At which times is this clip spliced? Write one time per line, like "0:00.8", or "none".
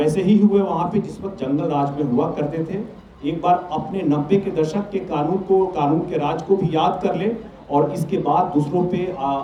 none